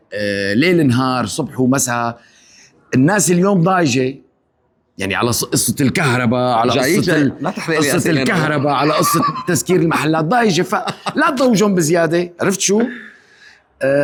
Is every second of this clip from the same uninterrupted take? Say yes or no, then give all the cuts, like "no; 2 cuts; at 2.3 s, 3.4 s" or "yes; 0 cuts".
yes; 0 cuts